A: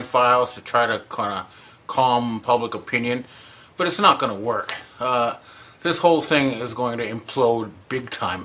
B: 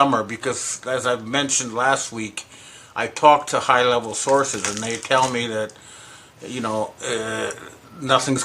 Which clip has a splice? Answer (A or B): A